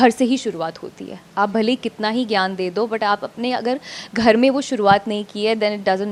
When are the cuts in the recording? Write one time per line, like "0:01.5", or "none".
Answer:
none